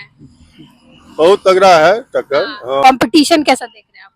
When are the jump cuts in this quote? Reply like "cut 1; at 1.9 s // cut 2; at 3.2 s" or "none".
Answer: cut 1; at 2.8 s